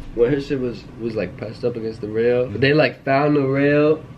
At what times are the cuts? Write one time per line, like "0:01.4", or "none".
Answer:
0:02.5